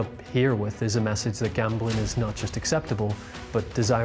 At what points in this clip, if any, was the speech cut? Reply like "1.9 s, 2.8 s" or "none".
none